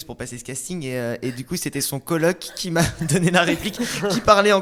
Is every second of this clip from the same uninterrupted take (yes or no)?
yes